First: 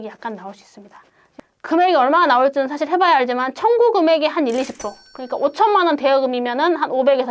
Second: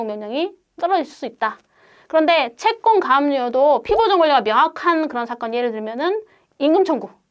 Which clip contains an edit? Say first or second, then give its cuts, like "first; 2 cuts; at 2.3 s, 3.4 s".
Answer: first; 1 cut; at 1.3 s